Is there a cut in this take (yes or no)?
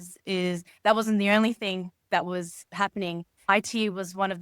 yes